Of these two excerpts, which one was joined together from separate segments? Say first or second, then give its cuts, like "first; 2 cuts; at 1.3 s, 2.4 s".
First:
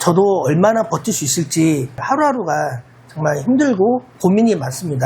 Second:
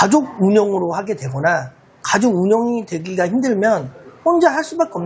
first; 1 cut; at 4.1 s